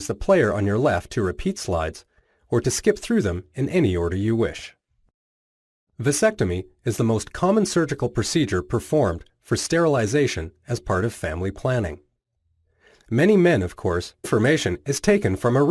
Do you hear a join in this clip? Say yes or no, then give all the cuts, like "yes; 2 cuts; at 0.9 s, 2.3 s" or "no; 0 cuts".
no; 0 cuts